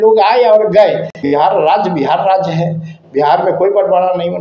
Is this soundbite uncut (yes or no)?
no